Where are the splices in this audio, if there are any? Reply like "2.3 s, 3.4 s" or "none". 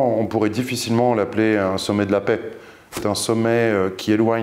2.9 s